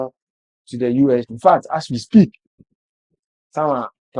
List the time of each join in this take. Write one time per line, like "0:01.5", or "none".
0:01.3